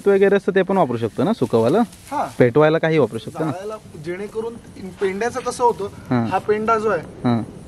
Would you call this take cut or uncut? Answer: uncut